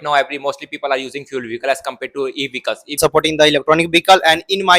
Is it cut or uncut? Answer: cut